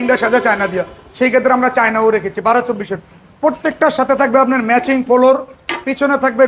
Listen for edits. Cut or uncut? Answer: uncut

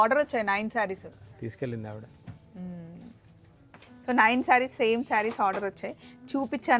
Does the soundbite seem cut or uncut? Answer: uncut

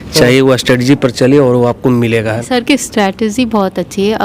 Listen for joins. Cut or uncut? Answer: cut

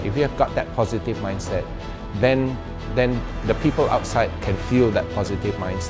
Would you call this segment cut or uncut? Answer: uncut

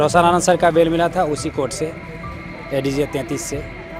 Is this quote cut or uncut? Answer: uncut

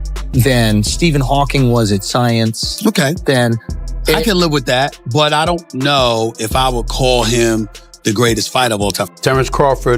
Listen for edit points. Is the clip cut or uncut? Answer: cut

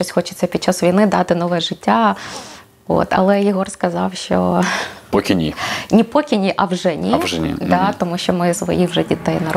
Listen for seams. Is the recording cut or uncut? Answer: cut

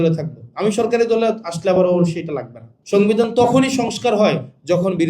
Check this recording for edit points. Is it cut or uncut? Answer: cut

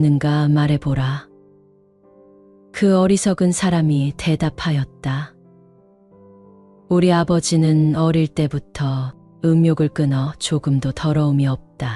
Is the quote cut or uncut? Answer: cut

